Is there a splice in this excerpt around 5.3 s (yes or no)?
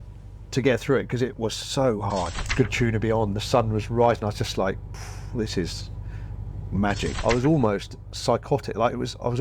no